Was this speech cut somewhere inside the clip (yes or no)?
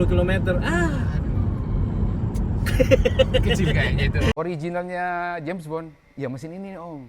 yes